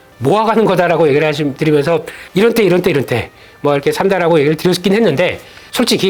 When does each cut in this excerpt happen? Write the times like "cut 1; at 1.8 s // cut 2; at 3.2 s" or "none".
cut 1; at 2.2 s